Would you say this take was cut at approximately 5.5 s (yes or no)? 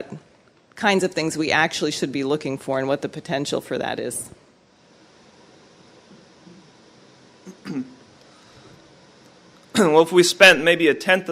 no